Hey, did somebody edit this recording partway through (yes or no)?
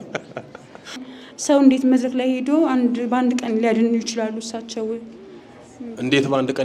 yes